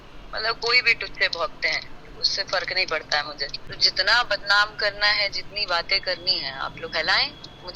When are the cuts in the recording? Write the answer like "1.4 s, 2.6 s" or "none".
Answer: 3.6 s